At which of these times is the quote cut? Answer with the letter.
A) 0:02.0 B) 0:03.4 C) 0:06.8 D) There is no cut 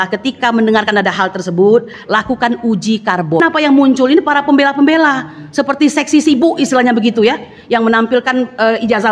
B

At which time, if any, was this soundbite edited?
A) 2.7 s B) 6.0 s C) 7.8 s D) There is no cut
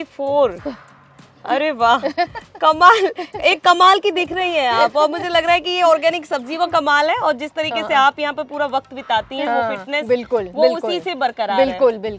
D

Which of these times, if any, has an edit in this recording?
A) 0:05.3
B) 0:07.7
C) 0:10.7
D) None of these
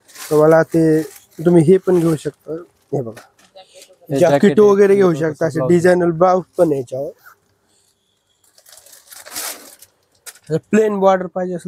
D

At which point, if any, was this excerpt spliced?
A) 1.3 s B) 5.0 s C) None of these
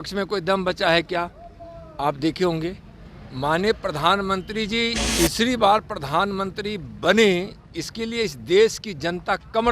B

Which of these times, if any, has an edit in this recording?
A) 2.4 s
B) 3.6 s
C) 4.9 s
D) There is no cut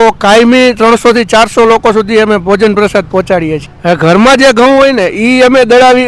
B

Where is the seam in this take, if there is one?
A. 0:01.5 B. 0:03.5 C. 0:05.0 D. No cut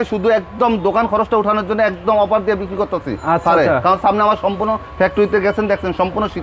D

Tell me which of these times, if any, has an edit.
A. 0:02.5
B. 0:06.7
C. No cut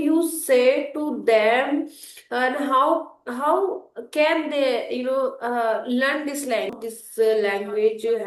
B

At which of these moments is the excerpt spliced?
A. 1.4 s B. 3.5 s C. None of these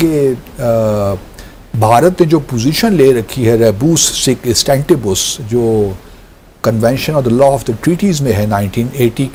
C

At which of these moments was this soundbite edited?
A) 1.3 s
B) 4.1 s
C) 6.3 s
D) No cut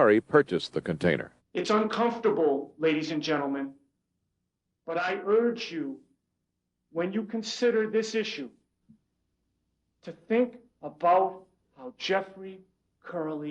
A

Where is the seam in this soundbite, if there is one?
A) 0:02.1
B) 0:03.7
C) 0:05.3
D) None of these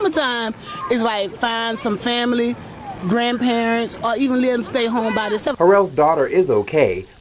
C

